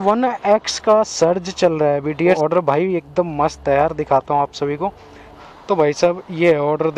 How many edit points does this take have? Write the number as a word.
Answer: two